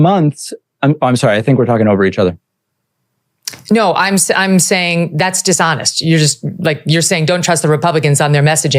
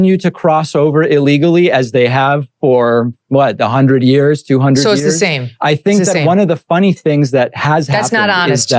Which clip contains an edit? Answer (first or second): first